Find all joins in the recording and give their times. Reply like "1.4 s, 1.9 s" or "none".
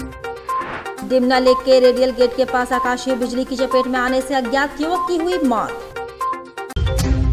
0.9 s